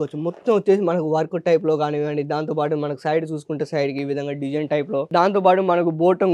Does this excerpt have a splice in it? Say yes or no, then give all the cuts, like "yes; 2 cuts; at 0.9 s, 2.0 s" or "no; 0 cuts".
yes; 1 cut; at 5.1 s